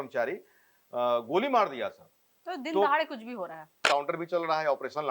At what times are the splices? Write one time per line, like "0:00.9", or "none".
0:03.7